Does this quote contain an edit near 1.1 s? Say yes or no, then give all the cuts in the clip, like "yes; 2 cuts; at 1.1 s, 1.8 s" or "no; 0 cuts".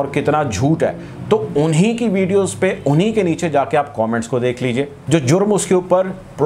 no; 1 cut; at 5.0 s